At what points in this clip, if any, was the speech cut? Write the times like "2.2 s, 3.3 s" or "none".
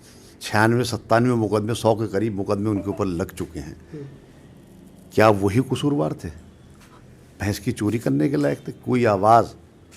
none